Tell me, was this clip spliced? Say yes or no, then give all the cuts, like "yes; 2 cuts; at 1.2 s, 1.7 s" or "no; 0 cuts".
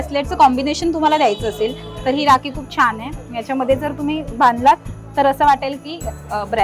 no; 0 cuts